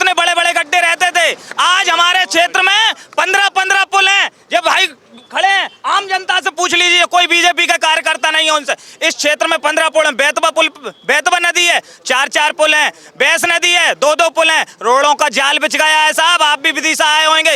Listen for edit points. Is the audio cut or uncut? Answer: uncut